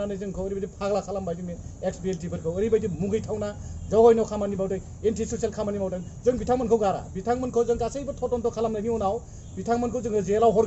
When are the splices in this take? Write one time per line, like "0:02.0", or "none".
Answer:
none